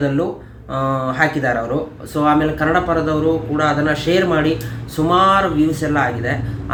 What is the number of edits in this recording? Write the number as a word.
zero